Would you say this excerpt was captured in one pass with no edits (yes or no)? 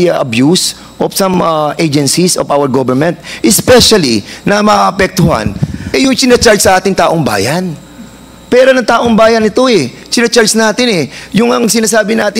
yes